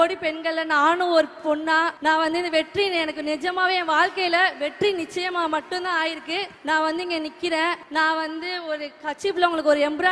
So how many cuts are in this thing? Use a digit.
3